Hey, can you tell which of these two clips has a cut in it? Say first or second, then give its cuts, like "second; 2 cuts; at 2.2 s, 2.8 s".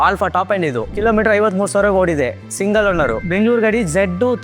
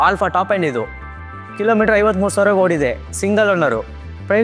first; 2 cuts; at 0.9 s, 3.2 s